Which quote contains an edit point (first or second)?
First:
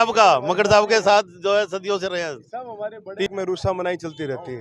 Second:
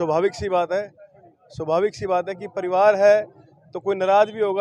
first